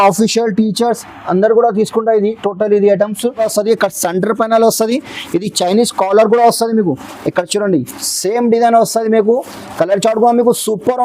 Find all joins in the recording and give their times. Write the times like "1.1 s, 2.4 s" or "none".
3.4 s